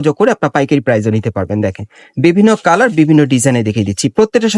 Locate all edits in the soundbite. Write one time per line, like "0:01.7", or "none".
none